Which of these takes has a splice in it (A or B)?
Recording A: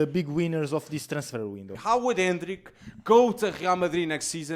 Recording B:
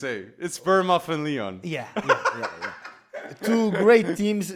A